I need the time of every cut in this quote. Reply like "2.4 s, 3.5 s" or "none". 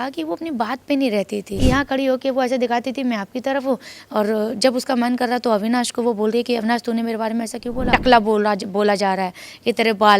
1.5 s, 7.9 s